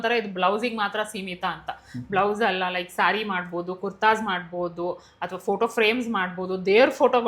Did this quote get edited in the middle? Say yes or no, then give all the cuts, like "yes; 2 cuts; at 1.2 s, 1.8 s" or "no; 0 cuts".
no; 0 cuts